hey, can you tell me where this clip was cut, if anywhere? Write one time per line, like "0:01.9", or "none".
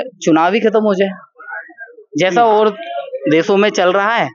none